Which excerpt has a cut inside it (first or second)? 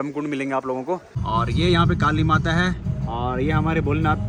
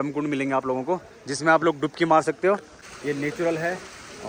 first